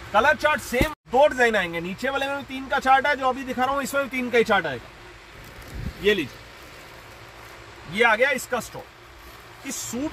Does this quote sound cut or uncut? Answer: cut